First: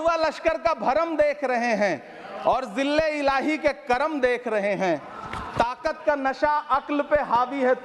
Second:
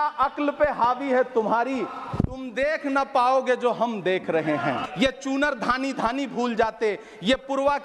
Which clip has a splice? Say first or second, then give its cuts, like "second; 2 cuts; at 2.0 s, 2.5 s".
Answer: second; 1 cut; at 4.8 s